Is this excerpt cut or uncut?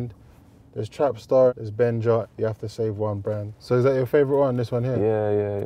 cut